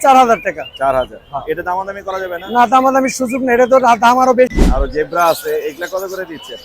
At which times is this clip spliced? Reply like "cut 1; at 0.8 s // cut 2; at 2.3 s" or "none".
cut 1; at 4.5 s